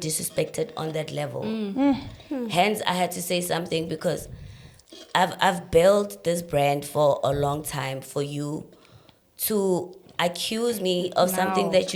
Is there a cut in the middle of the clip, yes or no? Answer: no